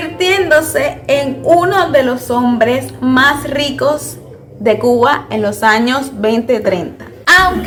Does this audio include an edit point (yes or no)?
no